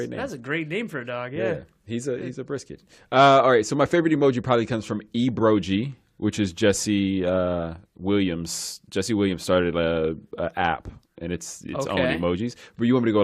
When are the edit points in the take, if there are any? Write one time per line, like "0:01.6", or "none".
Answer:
0:00.9